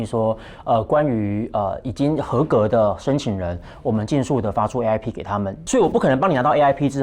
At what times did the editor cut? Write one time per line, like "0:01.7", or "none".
0:05.6